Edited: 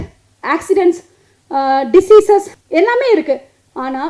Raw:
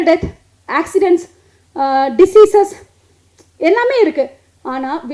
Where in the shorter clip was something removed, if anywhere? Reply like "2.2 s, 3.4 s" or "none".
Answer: 2.6 s